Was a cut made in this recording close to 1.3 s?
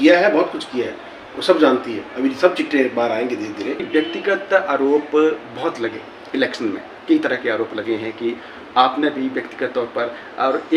no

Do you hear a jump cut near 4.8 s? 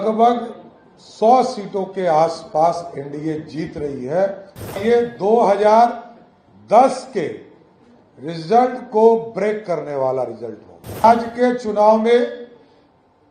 yes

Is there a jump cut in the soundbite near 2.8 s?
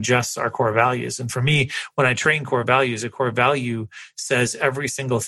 no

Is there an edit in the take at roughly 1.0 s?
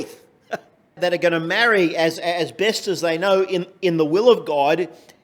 yes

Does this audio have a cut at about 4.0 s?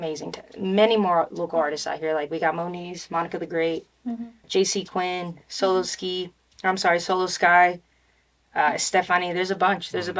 no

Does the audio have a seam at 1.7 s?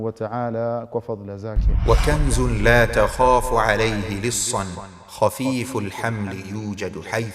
yes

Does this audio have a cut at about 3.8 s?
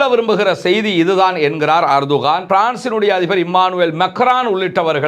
no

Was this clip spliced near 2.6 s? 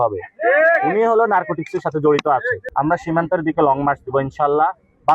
yes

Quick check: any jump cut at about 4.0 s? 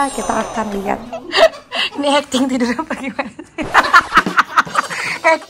no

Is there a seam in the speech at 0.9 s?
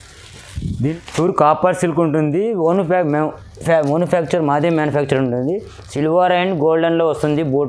yes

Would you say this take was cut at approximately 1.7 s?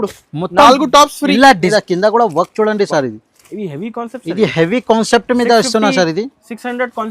yes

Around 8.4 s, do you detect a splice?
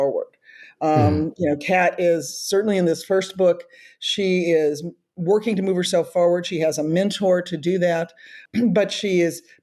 yes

